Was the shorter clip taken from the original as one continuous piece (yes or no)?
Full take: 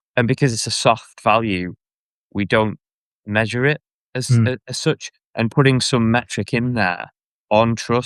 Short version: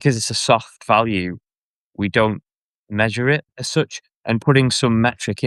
no